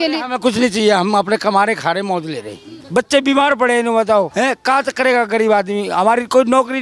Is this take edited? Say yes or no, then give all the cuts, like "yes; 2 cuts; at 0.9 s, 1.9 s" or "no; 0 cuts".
yes; 2 cuts; at 2.7 s, 4.3 s